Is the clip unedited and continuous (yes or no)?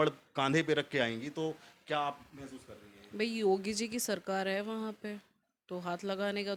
yes